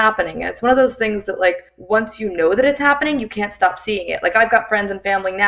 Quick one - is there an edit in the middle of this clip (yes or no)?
yes